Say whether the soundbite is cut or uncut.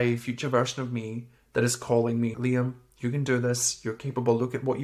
cut